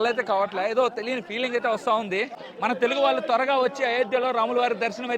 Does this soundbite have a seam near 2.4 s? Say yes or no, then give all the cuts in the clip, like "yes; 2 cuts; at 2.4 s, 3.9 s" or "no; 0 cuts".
yes; 1 cut; at 2.4 s